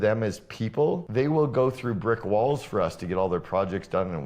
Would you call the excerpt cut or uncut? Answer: cut